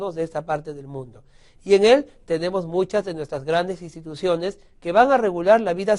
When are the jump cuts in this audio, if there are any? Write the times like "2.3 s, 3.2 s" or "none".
3.6 s